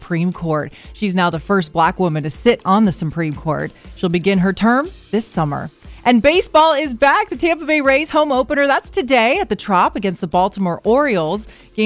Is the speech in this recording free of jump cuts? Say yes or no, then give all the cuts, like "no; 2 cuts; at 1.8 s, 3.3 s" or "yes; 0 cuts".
yes; 0 cuts